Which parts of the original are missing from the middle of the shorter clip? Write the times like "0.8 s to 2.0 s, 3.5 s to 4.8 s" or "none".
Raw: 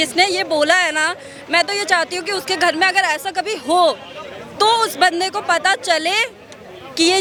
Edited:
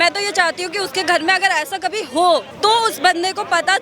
4.0 s to 4.5 s